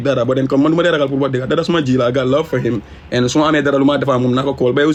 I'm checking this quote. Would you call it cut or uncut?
uncut